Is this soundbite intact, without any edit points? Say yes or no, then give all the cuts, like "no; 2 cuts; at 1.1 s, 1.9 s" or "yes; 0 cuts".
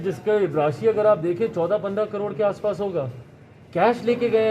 yes; 0 cuts